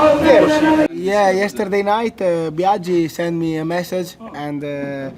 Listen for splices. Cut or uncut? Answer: cut